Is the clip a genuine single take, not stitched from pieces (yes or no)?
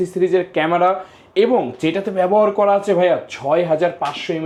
yes